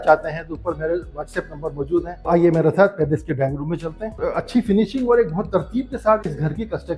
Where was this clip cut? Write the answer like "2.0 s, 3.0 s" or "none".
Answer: 2.2 s, 4.2 s